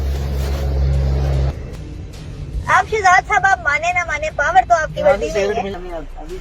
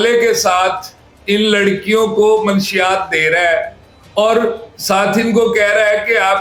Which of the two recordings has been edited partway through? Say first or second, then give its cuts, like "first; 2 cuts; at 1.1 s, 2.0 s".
first; 1 cut; at 1.7 s